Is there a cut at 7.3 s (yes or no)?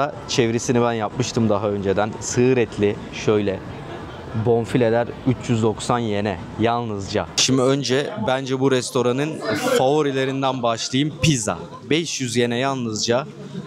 no